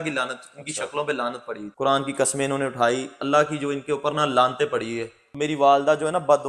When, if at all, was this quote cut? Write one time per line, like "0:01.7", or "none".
0:01.7
0:05.2